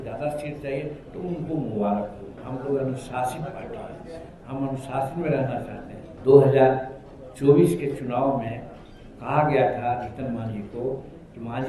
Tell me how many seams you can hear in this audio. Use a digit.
2